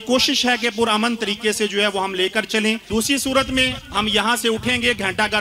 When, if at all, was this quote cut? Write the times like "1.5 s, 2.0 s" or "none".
2.8 s